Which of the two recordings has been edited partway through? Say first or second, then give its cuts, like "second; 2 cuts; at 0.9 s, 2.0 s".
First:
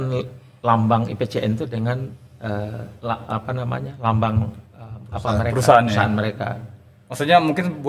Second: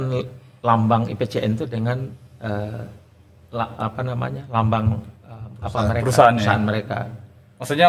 first; 1 cut; at 2.9 s